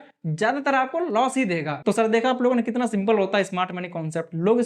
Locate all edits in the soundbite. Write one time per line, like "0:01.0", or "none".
0:01.7